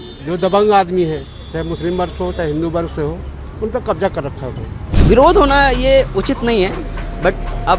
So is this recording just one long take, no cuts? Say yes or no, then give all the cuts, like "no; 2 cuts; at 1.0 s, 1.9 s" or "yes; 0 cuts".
no; 1 cut; at 4.9 s